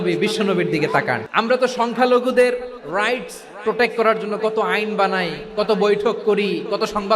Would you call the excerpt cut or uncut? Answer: cut